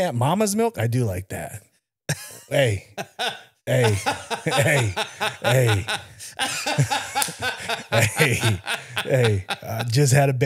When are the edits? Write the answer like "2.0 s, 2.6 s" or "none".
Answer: none